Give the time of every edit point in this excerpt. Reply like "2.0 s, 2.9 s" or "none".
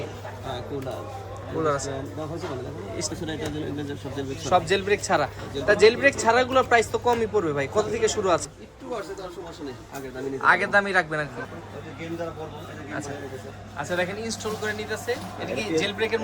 3.1 s, 8.4 s, 11.5 s